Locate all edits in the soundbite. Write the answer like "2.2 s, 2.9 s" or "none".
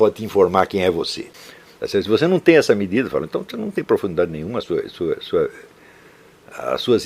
1.2 s